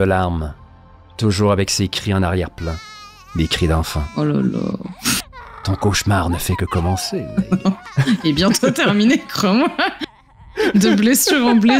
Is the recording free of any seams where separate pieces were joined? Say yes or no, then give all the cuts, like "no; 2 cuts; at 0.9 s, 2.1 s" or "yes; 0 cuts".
yes; 0 cuts